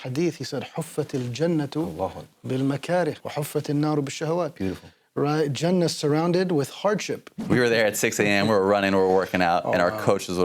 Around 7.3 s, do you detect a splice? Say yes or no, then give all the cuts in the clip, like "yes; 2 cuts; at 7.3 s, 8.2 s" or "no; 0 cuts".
yes; 2 cuts; at 3.2 s, 7.3 s